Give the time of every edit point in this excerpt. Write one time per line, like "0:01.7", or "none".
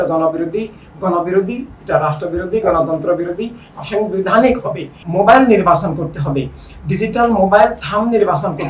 0:04.9